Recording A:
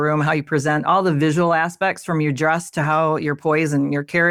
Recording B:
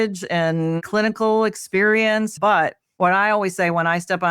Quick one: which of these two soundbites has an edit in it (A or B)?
B